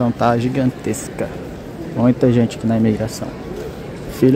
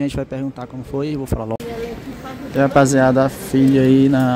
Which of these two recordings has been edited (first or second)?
second